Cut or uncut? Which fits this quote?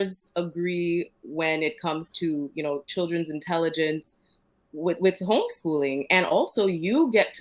uncut